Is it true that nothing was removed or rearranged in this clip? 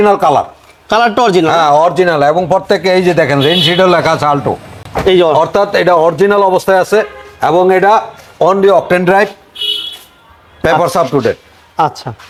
yes; 0 cuts

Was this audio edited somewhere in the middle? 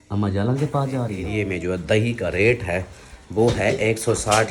yes; 1 cut; at 1.3 s

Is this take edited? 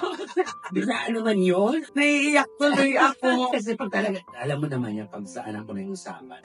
yes; 2 cuts; at 1.9 s, 3.5 s

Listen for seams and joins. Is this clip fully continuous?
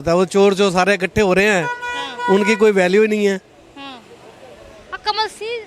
yes; 0 cuts

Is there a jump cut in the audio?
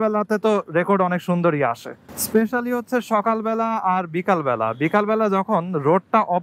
no; 0 cuts

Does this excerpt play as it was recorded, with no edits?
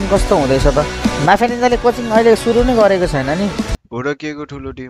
no; 1 cut; at 3.8 s

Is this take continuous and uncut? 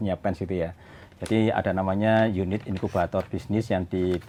yes; 0 cuts

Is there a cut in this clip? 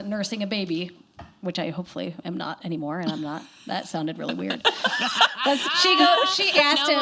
no; 0 cuts

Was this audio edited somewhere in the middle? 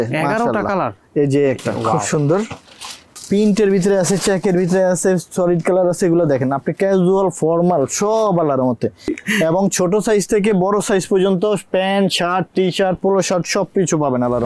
yes; 2 cuts; at 2.9 s, 9.1 s

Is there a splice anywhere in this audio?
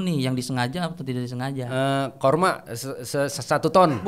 no; 0 cuts

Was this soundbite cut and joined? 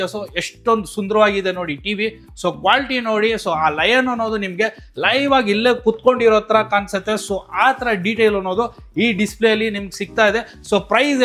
no; 0 cuts

